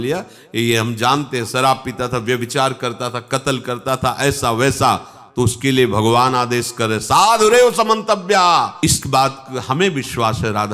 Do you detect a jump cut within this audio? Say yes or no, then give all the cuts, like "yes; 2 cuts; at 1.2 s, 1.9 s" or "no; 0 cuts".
yes; 1 cut; at 8.7 s